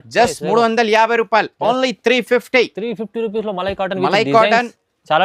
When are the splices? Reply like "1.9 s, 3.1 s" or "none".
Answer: none

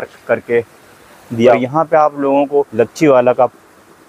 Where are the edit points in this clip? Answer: 1.3 s, 2.7 s

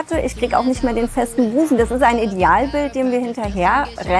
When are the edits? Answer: 1.8 s

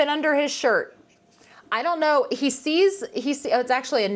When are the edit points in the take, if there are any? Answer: none

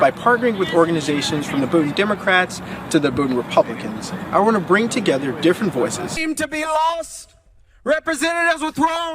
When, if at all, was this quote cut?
6.2 s

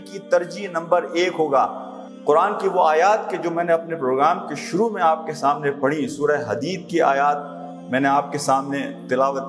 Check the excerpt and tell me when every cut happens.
none

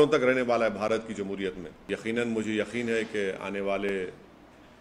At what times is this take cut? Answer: 1.8 s

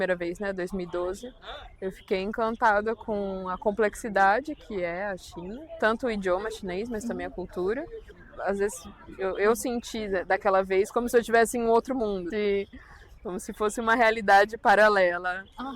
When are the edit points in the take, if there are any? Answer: 8.2 s, 12.3 s

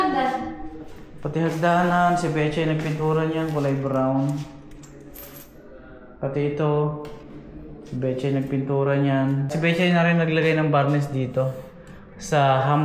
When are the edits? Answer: 9.5 s

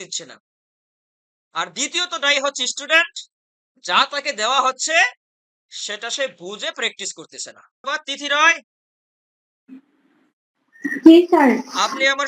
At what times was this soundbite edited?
7.8 s

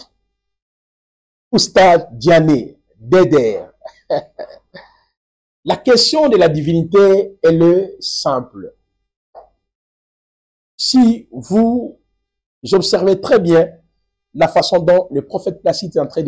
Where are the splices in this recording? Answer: none

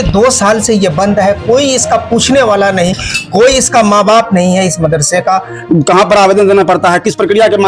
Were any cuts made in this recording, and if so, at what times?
5.5 s

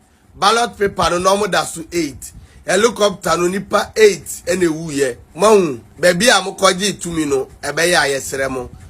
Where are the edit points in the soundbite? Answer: 5.2 s, 5.8 s

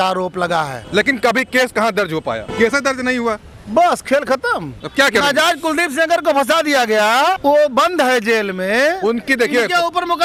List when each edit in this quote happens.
none

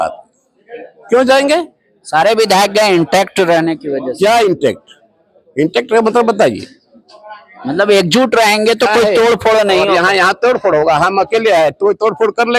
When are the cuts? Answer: none

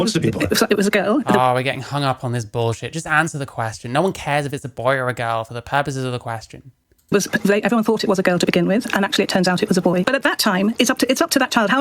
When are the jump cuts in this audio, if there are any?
10.0 s

